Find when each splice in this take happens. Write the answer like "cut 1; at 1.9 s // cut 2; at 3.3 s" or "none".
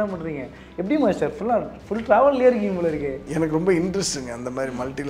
cut 1; at 3.2 s